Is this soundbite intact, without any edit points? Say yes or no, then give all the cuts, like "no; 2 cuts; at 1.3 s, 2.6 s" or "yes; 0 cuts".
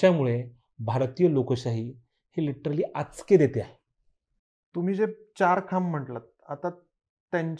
yes; 0 cuts